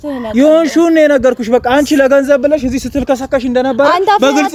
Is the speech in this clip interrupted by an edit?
no; 0 cuts

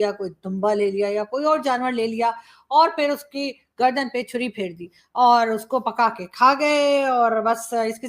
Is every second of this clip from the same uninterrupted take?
yes; 0 cuts

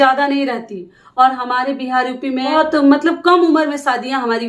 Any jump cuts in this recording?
yes; 1 cut; at 2.5 s

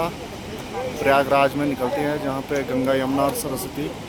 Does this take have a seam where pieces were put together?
no; 0 cuts

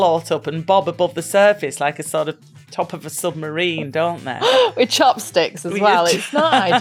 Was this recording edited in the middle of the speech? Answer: no; 0 cuts

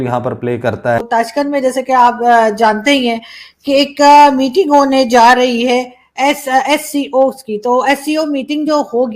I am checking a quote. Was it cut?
yes; 1 cut; at 1.0 s

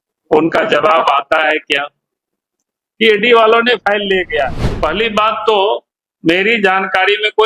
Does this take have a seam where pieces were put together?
yes; 1 cut; at 4.6 s

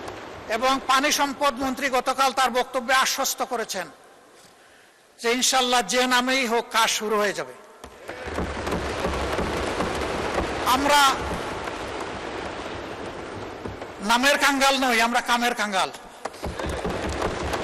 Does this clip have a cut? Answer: no; 0 cuts

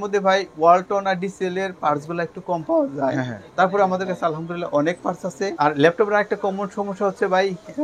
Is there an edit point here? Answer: yes; 1 cut; at 5.5 s

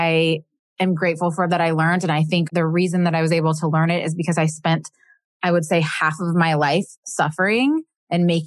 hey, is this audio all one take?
no; 1 cut; at 2.5 s

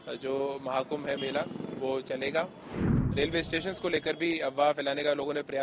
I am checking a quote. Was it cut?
yes; 1 cut; at 3.1 s

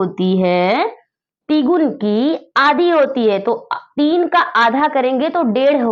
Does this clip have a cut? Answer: no; 0 cuts

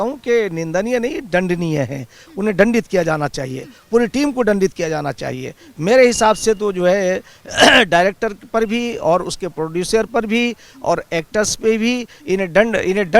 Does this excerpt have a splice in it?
no; 0 cuts

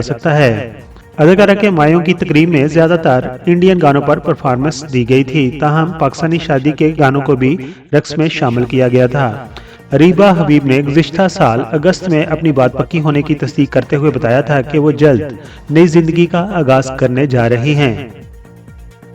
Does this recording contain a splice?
yes; 1 cut; at 18.1 s

